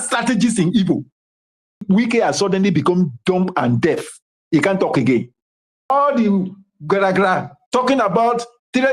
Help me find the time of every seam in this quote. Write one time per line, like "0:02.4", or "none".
0:01.8
0:05.9